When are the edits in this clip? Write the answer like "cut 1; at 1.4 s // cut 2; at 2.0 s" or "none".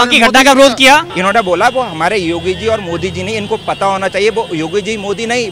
cut 1; at 1.1 s